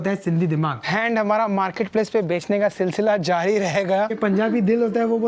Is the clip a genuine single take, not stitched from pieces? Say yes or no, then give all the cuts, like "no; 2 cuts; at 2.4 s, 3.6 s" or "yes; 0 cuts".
no; 2 cuts; at 0.9 s, 4.1 s